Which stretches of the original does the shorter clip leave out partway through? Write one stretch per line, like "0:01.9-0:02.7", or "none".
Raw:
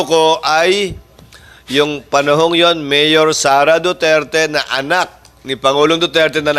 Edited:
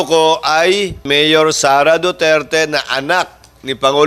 0:01.0-0:02.8